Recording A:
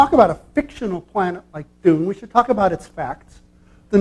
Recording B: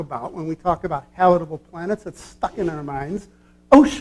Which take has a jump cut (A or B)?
B